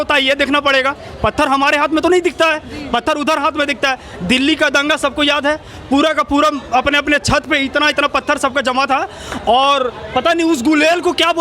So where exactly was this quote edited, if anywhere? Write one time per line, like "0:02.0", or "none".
none